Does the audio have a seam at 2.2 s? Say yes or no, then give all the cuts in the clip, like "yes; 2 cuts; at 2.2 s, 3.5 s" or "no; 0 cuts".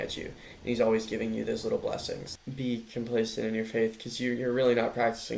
yes; 1 cut; at 2.2 s